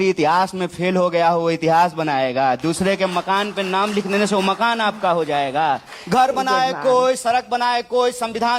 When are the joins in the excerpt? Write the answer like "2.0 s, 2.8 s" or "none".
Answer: 2.6 s, 5.9 s